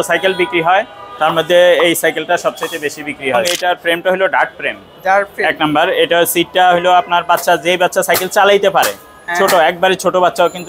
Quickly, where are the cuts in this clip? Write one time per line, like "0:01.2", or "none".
0:03.5